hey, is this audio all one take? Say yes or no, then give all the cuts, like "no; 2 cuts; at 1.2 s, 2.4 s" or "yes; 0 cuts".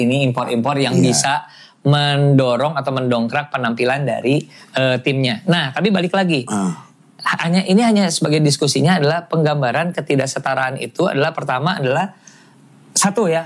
yes; 0 cuts